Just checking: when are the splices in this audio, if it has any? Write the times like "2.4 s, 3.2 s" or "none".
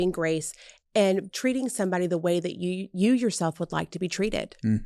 1.3 s